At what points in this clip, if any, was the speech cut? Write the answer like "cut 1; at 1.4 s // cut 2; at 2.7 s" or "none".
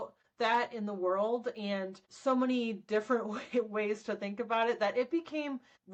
none

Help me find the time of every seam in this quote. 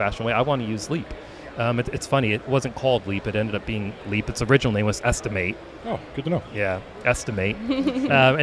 none

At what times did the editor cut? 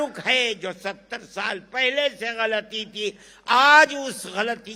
none

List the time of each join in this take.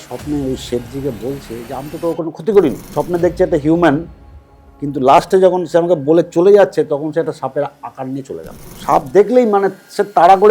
cut 1; at 2.9 s // cut 2; at 8.7 s

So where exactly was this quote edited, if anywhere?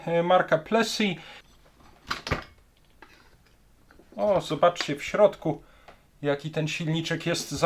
cut 1; at 1.3 s

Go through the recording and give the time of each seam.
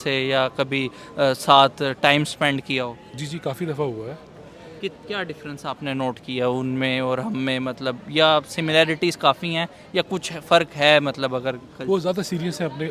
none

